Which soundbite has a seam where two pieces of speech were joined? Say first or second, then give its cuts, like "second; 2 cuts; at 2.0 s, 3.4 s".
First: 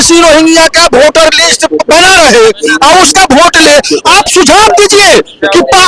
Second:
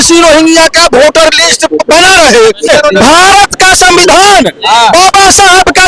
second; 1 cut; at 2.7 s